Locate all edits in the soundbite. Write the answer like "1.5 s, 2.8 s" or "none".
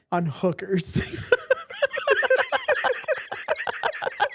none